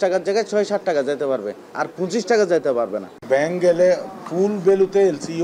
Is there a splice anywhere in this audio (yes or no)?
yes